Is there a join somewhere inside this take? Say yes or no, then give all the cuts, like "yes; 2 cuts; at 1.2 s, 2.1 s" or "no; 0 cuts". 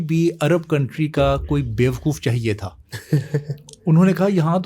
no; 0 cuts